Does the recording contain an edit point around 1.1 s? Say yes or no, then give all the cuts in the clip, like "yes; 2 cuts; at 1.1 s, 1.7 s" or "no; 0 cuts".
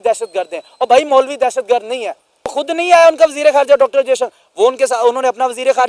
no; 1 cut; at 2.5 s